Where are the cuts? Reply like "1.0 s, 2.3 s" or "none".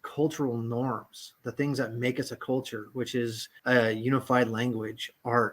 3.5 s